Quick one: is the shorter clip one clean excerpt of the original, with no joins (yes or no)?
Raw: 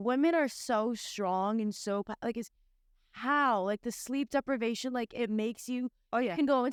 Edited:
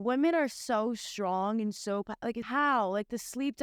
no